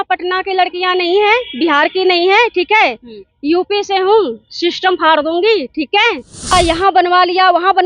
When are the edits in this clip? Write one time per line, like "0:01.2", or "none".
0:06.5